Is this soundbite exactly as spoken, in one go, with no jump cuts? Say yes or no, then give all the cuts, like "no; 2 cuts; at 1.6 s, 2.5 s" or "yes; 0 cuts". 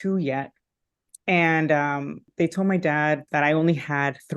no; 2 cuts; at 2.2 s, 3.2 s